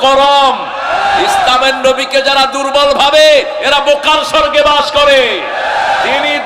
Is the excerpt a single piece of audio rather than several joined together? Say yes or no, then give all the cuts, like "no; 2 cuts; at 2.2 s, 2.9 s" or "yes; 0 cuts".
yes; 0 cuts